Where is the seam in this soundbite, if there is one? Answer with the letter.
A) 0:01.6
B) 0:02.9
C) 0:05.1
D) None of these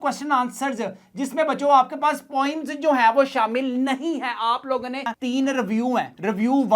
C